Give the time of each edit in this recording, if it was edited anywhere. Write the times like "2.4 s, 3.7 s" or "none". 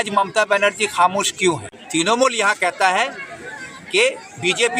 2.2 s